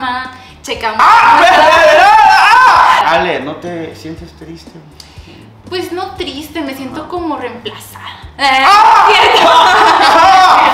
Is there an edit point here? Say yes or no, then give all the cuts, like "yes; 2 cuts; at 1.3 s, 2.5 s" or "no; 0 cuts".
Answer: yes; 1 cut; at 3.0 s